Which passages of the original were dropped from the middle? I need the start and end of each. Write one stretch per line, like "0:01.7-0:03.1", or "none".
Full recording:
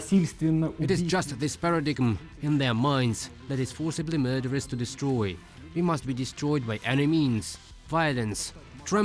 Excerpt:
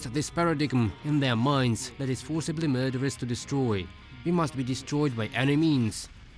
0:02.2-0:02.4
0:03.3-0:03.4